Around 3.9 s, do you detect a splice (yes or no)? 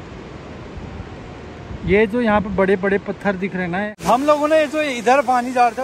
yes